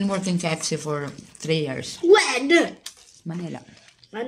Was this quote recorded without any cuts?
yes; 0 cuts

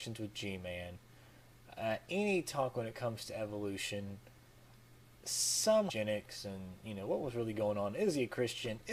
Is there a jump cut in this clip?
no; 0 cuts

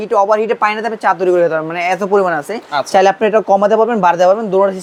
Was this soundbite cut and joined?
no; 0 cuts

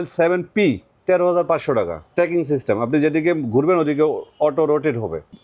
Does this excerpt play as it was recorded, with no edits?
yes; 0 cuts

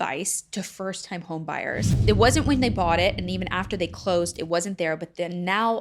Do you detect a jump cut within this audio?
yes; 1 cut; at 1.9 s

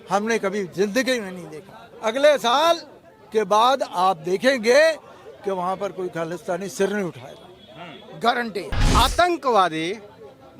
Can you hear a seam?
yes; 2 cuts; at 1.8 s, 8.9 s

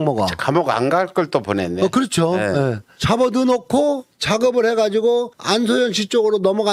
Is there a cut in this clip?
no; 0 cuts

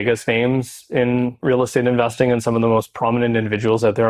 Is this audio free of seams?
yes; 0 cuts

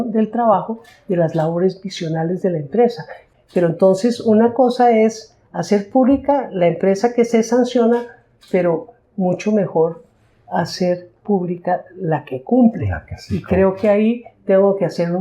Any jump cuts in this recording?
yes; 1 cut; at 3.2 s

